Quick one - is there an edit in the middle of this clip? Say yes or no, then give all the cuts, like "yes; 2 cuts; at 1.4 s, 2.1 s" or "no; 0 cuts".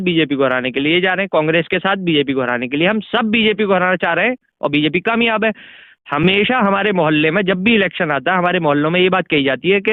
no; 0 cuts